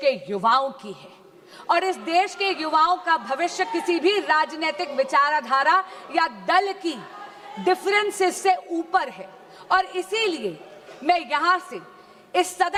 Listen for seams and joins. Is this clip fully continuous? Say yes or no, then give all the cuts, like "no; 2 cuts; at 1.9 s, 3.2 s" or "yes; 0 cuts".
yes; 0 cuts